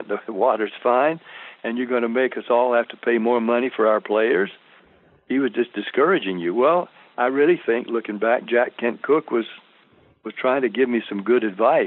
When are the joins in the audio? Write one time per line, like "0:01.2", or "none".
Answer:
none